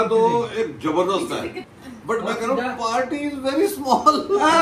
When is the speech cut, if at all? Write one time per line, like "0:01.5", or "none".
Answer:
none